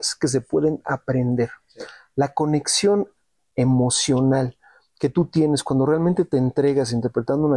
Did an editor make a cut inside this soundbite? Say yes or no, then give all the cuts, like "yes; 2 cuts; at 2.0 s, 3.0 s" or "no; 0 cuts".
no; 0 cuts